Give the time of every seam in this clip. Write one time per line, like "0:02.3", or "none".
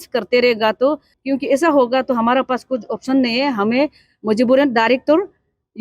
0:01.1